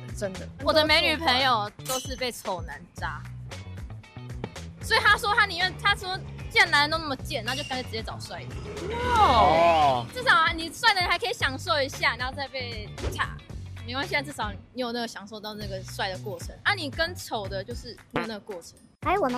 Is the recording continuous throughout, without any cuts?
yes; 0 cuts

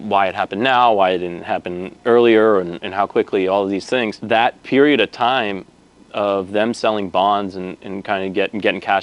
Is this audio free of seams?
no; 1 cut; at 4.2 s

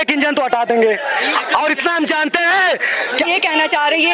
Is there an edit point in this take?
no; 0 cuts

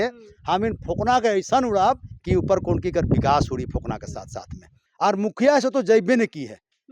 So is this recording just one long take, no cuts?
no; 1 cut; at 4.8 s

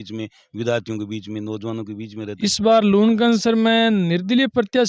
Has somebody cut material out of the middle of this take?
yes; 1 cut; at 2.4 s

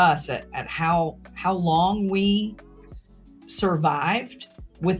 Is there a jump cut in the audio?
no; 0 cuts

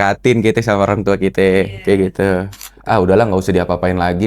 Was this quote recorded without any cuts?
no; 1 cut; at 2.7 s

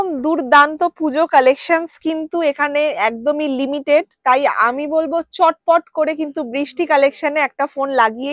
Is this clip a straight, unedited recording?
yes; 0 cuts

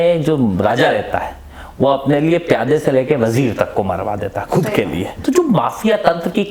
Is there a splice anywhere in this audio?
yes; 1 cut; at 5.1 s

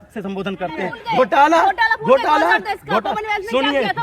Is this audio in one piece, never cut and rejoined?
no; 1 cut; at 1.0 s

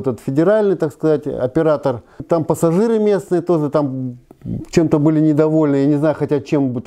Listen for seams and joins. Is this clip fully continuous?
no; 1 cut; at 2.2 s

